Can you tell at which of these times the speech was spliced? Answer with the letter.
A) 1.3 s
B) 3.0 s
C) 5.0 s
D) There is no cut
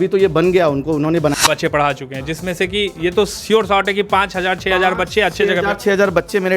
A